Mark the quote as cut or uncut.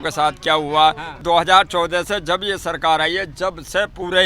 cut